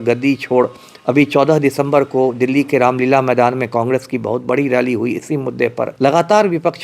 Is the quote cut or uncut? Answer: cut